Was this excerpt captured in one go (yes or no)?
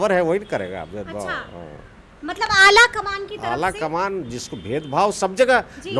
yes